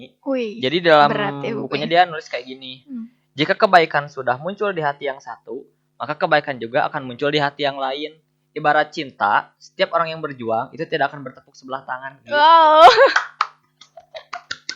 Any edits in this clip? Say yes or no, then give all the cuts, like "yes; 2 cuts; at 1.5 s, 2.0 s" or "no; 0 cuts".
no; 0 cuts